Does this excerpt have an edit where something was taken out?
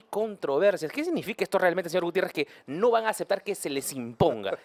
no; 0 cuts

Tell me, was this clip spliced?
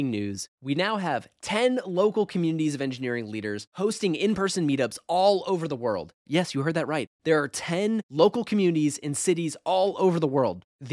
no; 0 cuts

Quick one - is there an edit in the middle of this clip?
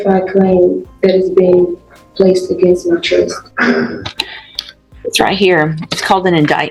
no; 0 cuts

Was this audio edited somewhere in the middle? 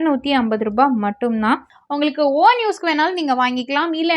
yes; 1 cut; at 1.8 s

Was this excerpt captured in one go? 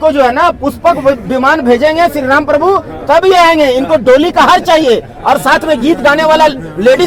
yes; 0 cuts

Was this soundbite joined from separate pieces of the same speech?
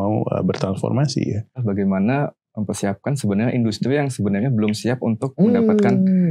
yes; 1 cut; at 1.6 s

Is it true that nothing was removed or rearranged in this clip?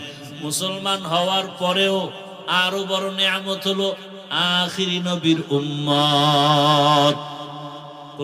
yes; 0 cuts

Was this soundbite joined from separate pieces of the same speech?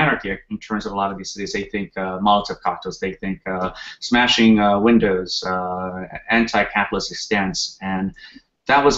no; 0 cuts

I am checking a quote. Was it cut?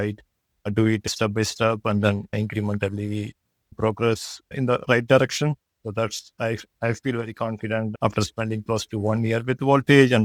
no; 0 cuts

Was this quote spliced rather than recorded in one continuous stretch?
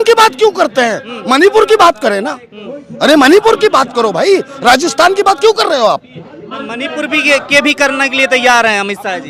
no; 0 cuts

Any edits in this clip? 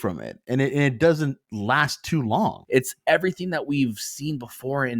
yes; 1 cut; at 2.6 s

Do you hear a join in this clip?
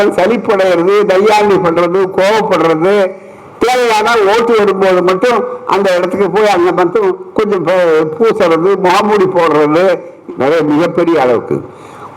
yes; 1 cut; at 10.2 s

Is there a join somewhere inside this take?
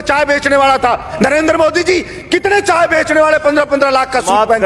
yes; 1 cut; at 1.1 s

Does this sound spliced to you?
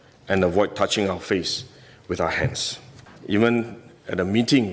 yes; 1 cut; at 3.1 s

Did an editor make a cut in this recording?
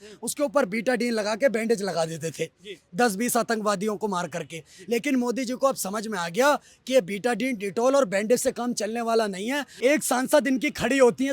yes; 1 cut; at 9.7 s

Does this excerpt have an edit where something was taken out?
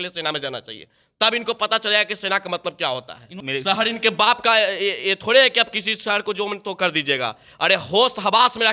yes; 1 cut; at 3.4 s

